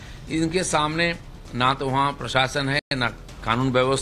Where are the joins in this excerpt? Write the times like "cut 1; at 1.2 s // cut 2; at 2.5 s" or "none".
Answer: none